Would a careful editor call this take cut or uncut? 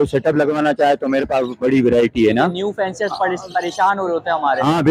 uncut